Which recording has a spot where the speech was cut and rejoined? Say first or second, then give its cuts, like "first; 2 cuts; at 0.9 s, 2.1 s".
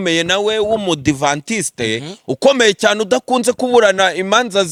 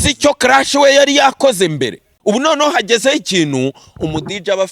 second; 1 cut; at 2.0 s